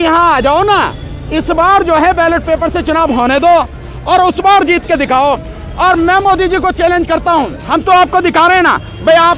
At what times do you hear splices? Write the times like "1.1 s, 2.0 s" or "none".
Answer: 7.6 s